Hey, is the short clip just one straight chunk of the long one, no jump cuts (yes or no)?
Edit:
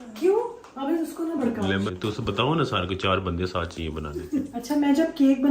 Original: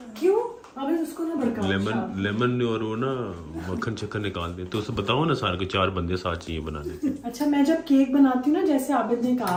no